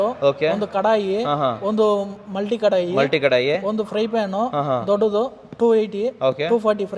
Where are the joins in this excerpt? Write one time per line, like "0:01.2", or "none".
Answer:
none

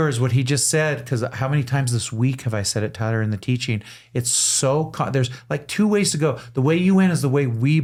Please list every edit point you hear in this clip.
none

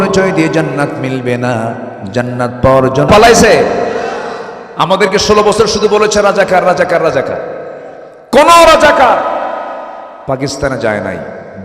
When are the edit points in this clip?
0:03.1

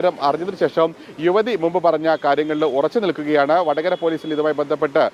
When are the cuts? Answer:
none

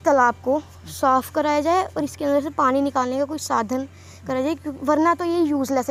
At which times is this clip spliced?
none

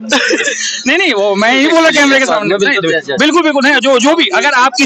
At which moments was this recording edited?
none

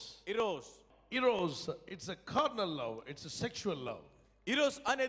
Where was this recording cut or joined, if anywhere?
none

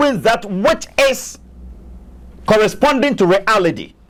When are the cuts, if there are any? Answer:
none

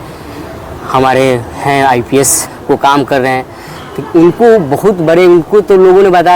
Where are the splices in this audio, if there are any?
0:02.5

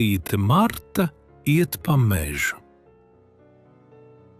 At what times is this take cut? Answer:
0:03.3

